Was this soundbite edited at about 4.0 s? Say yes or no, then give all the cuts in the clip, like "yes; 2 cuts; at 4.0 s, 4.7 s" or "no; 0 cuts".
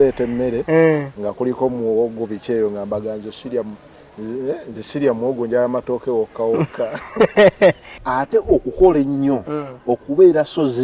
no; 1 cut; at 7.9 s